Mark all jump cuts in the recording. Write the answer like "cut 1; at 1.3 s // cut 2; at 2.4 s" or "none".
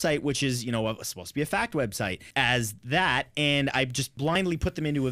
cut 1; at 2.2 s // cut 2; at 4.3 s